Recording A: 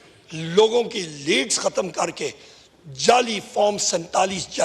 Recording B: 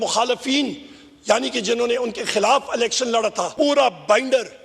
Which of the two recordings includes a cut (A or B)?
B